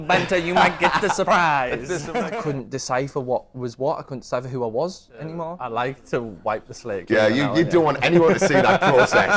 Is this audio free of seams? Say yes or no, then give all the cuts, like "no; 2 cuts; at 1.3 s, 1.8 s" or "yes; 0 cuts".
no; 2 cuts; at 2.2 s, 5.6 s